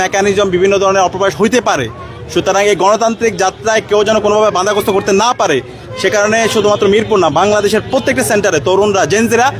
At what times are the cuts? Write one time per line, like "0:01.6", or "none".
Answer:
none